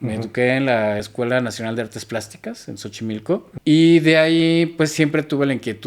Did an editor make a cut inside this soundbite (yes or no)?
yes